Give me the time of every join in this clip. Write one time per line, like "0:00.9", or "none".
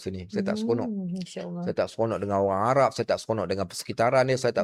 none